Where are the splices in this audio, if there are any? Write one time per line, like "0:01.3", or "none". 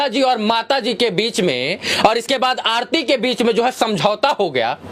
none